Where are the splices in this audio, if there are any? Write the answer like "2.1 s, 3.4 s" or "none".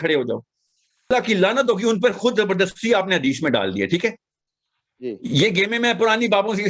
1.1 s